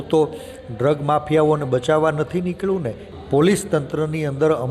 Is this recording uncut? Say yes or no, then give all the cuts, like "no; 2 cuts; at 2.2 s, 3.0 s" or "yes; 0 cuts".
no; 1 cut; at 3.0 s